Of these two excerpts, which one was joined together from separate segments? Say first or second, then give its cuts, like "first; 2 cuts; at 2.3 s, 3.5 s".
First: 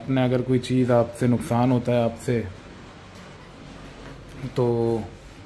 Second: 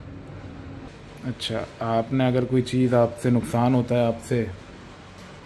second; 1 cut; at 0.9 s